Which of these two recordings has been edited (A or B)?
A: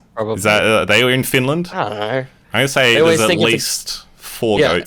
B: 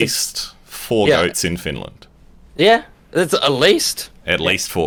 A